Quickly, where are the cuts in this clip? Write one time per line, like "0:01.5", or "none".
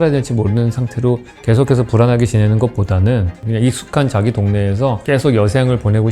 0:03.4
0:05.0